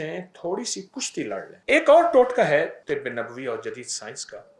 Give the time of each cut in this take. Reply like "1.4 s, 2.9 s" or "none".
1.5 s, 2.8 s